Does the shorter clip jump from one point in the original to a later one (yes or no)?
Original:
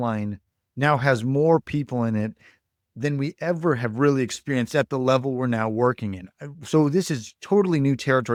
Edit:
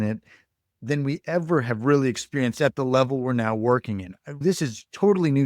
yes